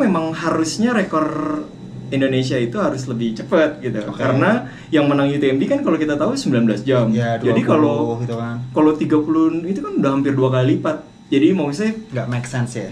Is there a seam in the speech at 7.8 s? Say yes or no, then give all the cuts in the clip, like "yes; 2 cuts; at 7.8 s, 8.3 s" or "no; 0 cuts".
no; 0 cuts